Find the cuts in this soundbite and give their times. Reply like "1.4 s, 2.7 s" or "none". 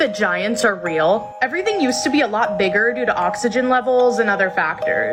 none